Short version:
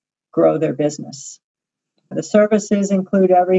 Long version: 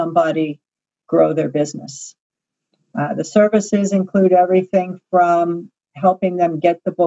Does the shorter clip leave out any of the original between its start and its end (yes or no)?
yes